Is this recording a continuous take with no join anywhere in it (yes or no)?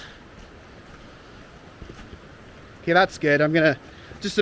no